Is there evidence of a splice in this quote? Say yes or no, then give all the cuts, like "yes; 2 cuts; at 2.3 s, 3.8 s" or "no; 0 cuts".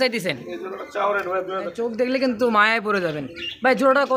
yes; 1 cut; at 1.7 s